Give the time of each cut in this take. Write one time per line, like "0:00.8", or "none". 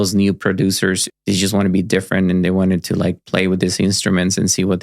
0:01.1